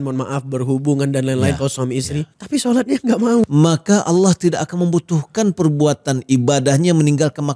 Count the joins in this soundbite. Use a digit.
1